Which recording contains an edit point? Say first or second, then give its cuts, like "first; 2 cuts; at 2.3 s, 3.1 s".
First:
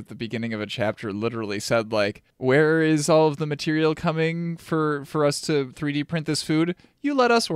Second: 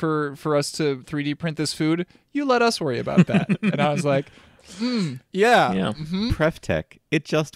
first; 1 cut; at 2.3 s